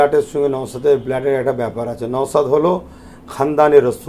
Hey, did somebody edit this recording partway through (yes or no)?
no